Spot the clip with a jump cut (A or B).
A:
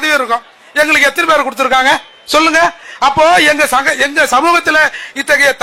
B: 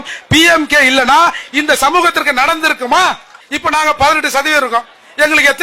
B